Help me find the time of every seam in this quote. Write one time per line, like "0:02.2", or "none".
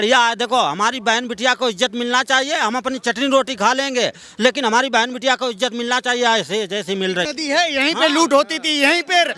0:07.3